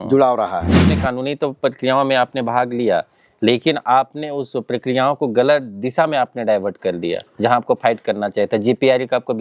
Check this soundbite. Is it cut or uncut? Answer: cut